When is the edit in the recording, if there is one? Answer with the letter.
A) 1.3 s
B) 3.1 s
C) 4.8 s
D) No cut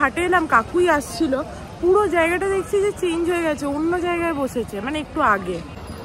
D